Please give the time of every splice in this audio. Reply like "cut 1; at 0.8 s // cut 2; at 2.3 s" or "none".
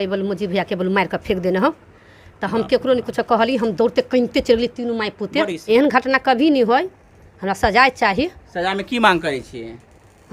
cut 1; at 5.6 s